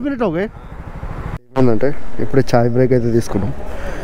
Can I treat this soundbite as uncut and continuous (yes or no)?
no